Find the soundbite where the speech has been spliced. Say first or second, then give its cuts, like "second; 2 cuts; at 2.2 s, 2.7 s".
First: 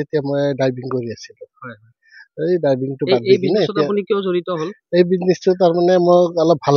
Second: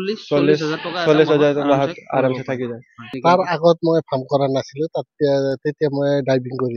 second; 1 cut; at 3.2 s